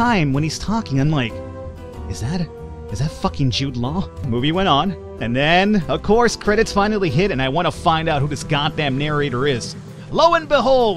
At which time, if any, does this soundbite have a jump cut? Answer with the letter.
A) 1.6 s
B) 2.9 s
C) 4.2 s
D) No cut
C